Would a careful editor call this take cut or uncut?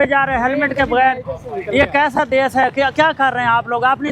uncut